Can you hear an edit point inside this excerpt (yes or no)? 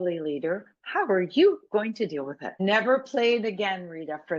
yes